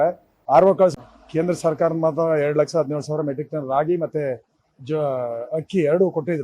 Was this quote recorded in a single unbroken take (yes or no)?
no